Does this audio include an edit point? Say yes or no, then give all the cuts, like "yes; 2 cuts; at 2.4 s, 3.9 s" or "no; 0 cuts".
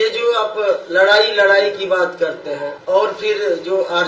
yes; 1 cut; at 2.7 s